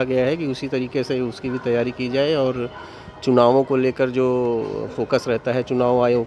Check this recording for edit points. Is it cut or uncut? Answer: uncut